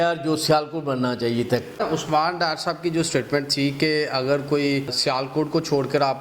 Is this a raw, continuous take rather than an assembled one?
no; 2 cuts; at 1.8 s, 5.0 s

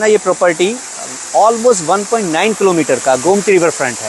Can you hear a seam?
no; 0 cuts

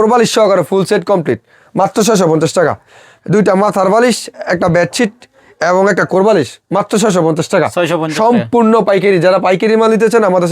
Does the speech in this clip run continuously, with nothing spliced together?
yes; 0 cuts

